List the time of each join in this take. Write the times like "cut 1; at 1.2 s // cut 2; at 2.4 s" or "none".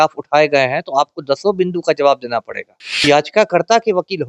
cut 1; at 3.0 s